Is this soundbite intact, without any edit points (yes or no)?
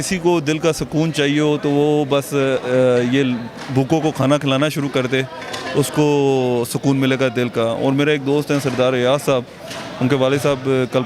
yes